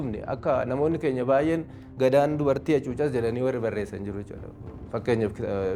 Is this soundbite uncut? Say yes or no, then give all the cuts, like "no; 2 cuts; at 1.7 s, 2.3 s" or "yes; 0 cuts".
yes; 0 cuts